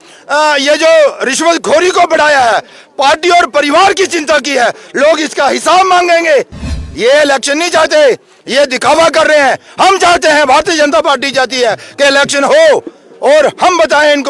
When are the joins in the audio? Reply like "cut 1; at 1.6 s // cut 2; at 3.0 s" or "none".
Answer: none

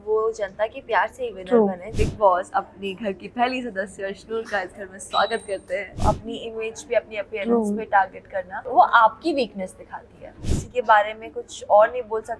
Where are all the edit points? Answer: cut 1; at 1.9 s // cut 2; at 6.0 s // cut 3; at 8.6 s // cut 4; at 10.6 s

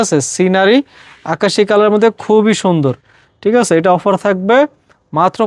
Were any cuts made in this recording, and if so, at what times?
none

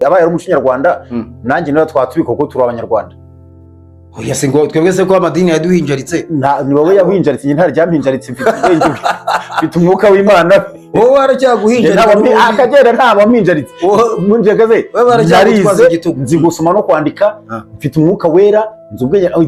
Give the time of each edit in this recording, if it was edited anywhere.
none

